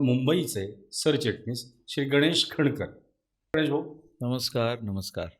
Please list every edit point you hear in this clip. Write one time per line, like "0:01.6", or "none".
0:03.5